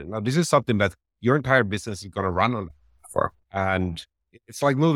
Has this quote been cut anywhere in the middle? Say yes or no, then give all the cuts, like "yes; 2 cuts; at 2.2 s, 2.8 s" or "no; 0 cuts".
yes; 1 cut; at 3.4 s